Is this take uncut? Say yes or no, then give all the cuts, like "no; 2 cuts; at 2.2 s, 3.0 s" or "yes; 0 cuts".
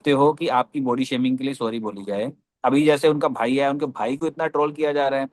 no; 1 cut; at 2.5 s